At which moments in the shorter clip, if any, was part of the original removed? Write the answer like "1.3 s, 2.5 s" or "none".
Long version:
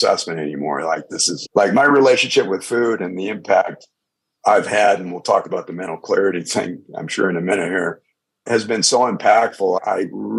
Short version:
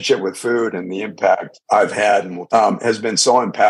1.5 s, 2.4 s